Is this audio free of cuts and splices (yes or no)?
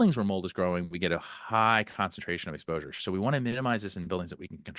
yes